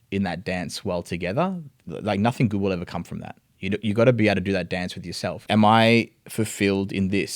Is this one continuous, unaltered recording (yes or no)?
no